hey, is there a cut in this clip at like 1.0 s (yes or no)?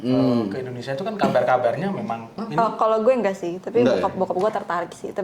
no